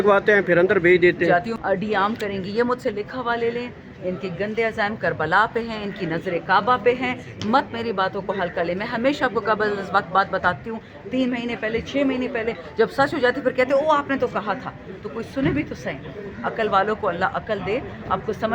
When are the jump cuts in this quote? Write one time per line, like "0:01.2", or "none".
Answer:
0:01.6